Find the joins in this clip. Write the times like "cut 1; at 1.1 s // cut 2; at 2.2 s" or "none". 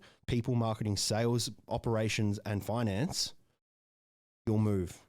cut 1; at 1.7 s